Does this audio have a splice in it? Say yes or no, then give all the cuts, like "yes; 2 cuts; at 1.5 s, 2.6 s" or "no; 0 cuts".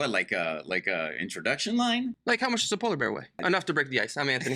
yes; 1 cut; at 2.2 s